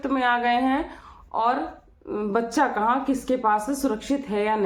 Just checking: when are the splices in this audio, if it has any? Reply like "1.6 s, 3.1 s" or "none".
none